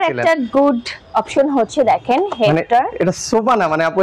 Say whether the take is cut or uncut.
uncut